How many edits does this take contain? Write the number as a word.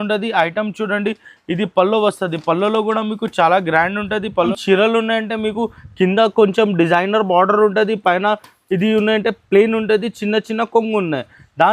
one